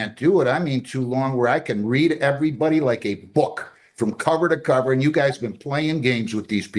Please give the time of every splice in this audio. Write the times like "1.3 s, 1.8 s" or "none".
none